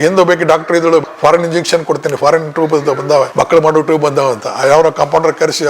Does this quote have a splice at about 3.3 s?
yes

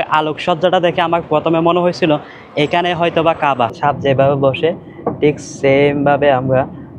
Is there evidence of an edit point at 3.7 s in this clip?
yes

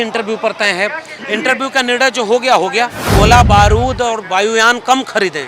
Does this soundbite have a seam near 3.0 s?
yes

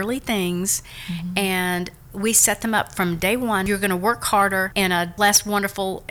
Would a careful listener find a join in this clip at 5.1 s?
yes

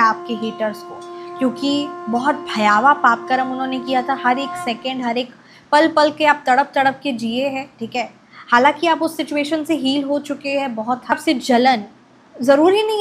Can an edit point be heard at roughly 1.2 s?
no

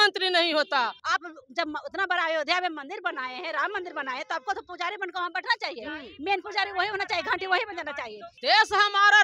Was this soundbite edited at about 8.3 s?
yes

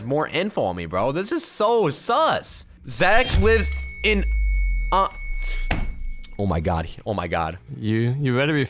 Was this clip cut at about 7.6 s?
yes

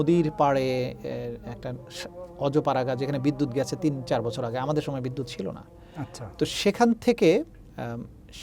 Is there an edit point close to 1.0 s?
no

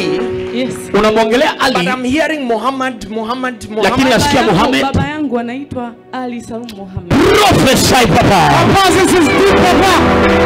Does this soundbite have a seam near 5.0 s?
no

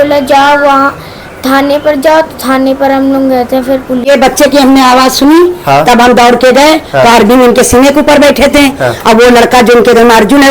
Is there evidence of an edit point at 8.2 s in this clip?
no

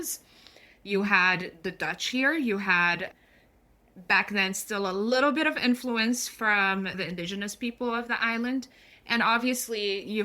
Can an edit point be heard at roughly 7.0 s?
yes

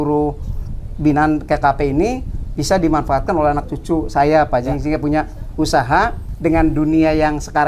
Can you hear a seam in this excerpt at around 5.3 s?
no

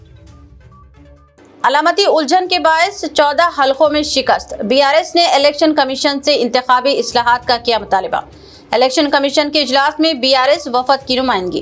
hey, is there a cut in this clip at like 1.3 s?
no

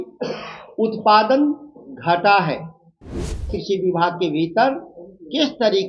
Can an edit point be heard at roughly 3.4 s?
yes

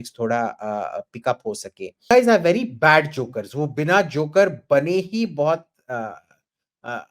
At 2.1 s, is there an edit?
yes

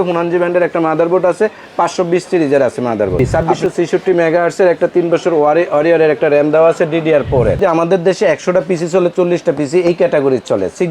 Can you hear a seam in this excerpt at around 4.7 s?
no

